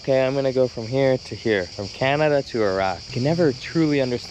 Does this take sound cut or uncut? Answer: cut